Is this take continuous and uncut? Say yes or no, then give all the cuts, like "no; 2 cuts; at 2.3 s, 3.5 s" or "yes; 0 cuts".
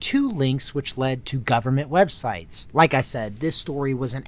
no; 1 cut; at 2.5 s